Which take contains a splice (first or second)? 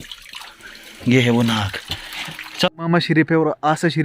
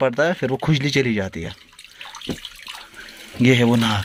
first